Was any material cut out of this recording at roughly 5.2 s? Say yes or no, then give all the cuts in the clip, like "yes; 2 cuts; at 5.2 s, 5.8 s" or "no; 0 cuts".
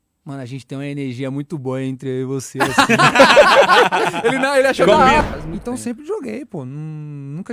yes; 1 cut; at 5.2 s